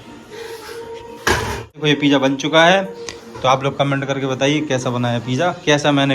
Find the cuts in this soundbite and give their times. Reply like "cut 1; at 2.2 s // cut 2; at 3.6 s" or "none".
cut 1; at 1.8 s